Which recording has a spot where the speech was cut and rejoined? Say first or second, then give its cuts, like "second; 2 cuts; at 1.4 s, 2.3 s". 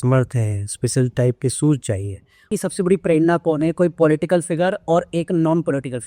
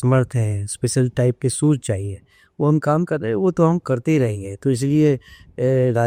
first; 1 cut; at 2.4 s